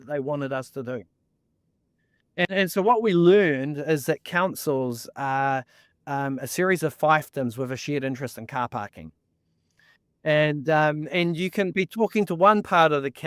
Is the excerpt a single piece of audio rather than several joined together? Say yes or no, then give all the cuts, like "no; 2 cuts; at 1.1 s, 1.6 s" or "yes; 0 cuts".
yes; 0 cuts